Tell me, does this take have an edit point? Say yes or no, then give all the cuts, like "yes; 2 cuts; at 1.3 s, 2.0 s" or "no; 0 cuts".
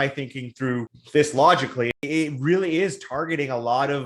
yes; 2 cuts; at 1.0 s, 2.0 s